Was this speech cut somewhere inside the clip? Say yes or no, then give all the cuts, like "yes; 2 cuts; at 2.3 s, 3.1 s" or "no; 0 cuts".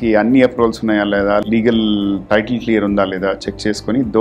yes; 1 cut; at 1.4 s